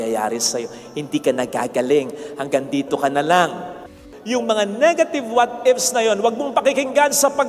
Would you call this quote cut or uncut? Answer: cut